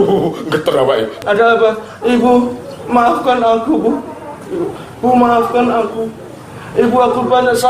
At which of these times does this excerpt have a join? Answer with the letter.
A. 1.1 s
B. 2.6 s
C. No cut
A